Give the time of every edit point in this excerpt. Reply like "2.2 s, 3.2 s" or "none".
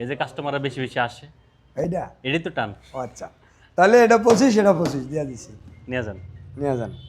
none